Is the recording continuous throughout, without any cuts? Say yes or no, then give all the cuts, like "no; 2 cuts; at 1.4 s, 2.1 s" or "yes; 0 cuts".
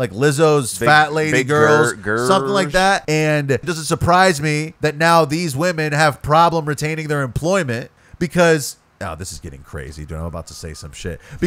no; 4 cuts; at 3.0 s, 3.7 s, 4.7 s, 8.0 s